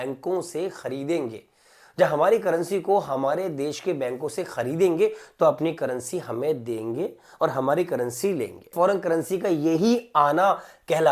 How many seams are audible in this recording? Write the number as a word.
one